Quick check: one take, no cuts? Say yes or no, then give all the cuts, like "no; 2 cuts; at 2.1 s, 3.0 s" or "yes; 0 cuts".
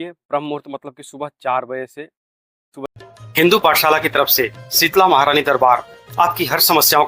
no; 1 cut; at 2.8 s